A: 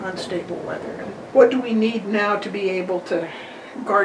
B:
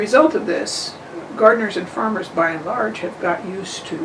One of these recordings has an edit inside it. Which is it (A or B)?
A